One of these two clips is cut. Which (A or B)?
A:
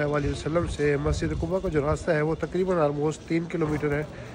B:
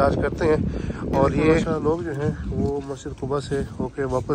B